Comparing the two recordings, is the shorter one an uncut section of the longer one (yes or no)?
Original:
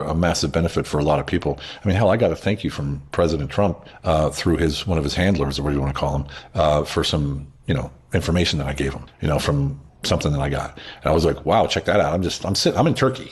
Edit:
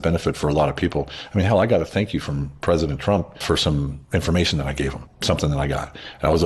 no